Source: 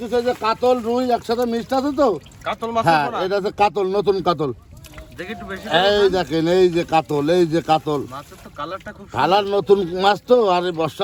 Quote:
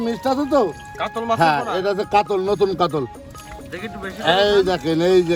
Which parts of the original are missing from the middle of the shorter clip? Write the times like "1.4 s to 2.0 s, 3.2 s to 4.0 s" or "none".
none